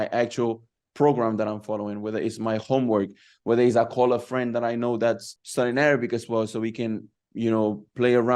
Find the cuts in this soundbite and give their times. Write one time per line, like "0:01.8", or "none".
0:05.3